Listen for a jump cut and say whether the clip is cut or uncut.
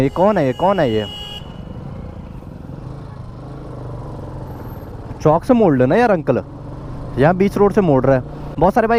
uncut